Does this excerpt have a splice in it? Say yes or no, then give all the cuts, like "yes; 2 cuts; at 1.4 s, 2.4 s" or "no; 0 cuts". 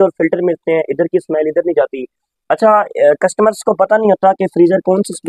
no; 0 cuts